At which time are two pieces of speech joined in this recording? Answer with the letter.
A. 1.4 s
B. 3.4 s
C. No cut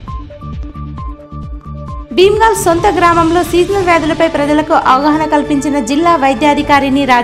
A